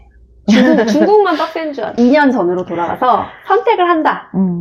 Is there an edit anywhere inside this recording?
yes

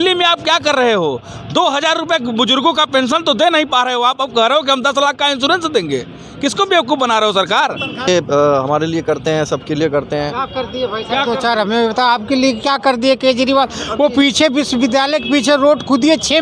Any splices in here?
yes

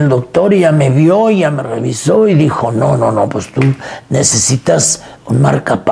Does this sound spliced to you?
no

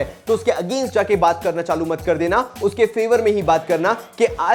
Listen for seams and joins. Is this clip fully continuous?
yes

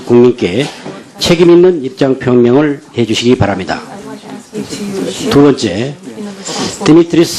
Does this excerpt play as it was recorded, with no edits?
yes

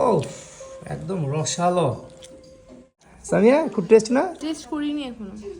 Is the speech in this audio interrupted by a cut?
yes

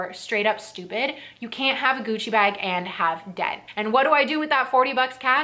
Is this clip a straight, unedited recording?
no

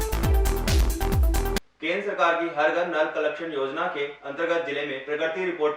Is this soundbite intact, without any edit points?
no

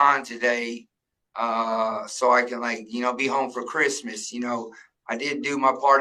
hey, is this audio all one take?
yes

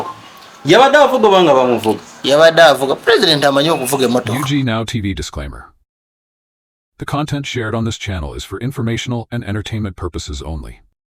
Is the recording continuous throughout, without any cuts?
no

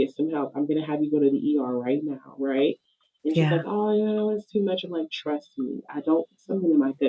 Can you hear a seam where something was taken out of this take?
no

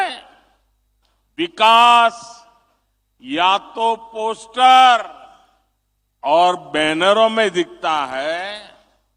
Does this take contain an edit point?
no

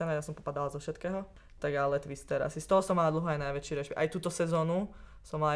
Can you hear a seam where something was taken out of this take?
yes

